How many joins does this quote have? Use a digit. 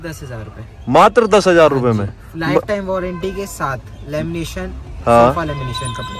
0